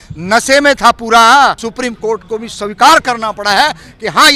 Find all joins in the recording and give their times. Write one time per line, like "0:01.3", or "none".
0:01.7